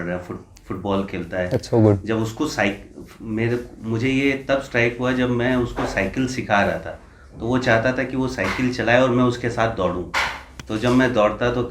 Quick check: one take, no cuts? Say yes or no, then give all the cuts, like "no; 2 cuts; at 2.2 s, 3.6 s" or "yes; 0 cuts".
yes; 0 cuts